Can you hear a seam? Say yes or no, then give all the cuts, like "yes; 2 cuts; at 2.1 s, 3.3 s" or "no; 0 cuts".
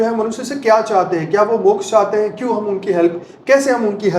no; 0 cuts